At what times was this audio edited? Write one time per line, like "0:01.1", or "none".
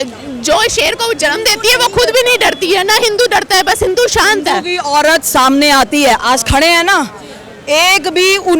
none

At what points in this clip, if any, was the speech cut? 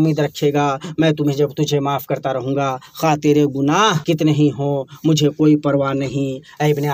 0:04.0

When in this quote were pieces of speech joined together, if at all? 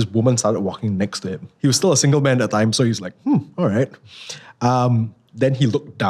0:01.4

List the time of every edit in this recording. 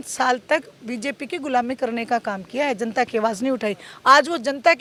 none

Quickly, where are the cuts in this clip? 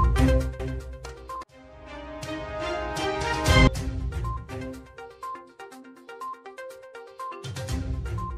none

